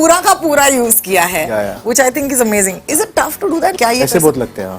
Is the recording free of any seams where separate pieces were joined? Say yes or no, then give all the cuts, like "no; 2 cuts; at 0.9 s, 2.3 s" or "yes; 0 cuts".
no; 1 cut; at 3.7 s